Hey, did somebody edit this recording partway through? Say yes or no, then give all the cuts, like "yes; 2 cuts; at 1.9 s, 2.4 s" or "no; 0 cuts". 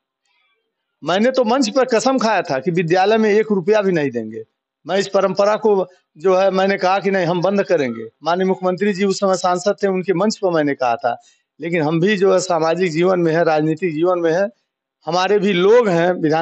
no; 0 cuts